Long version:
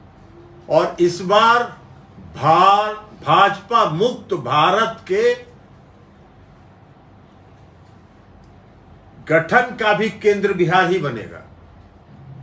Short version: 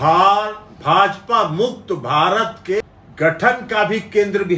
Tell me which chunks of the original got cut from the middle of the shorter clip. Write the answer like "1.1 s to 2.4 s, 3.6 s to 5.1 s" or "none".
5.2 s to 8.9 s